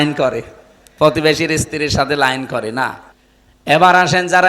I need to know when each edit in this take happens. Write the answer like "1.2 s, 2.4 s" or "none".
3.1 s

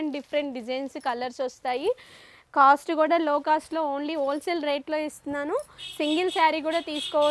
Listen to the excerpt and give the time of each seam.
none

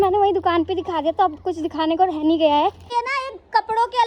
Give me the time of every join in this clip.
2.8 s

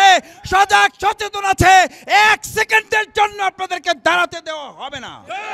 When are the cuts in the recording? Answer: none

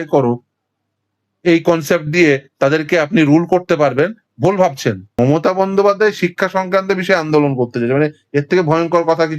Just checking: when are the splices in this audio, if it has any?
5.1 s

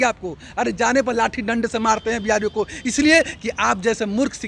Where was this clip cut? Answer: none

